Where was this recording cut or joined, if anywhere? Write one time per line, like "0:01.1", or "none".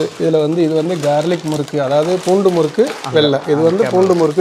none

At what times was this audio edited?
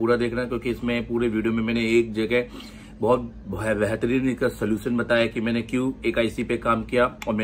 none

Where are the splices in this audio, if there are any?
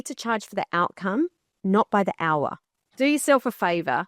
0:02.8

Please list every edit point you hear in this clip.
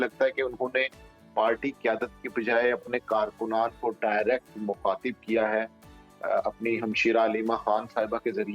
none

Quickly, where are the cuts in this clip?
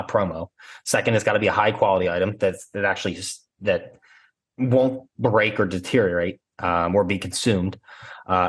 none

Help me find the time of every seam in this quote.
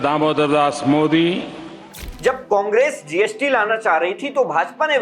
0:02.1

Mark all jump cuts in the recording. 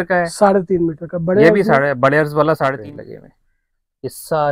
0:02.8

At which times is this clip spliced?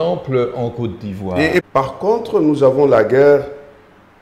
0:01.7

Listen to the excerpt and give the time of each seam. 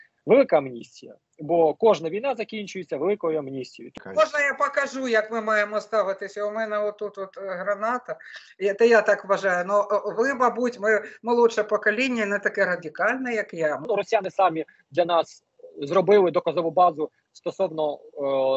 0:03.9
0:13.9

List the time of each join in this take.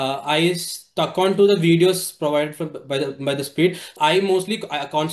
0:03.9

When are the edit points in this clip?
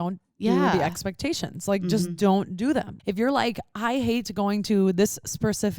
0:02.9

